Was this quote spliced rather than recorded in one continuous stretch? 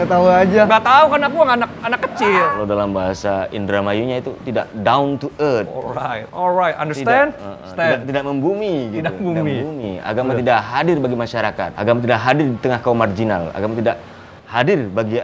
yes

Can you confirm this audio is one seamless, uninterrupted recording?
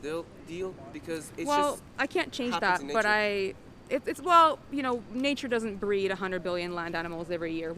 yes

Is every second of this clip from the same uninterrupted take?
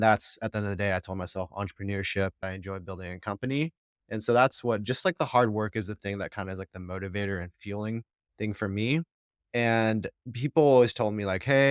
no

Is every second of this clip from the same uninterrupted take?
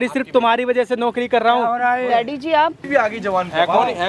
no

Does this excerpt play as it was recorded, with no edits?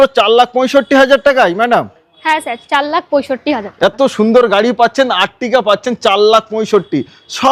yes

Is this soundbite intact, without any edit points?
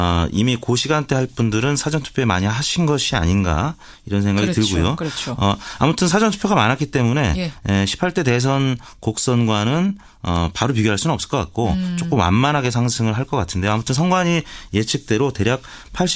no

